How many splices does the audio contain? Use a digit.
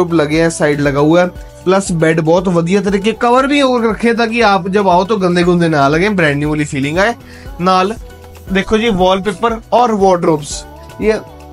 0